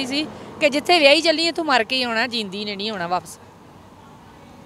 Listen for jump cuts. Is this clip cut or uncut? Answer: uncut